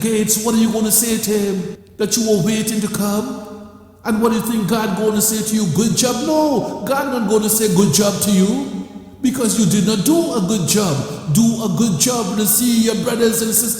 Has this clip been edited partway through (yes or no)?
yes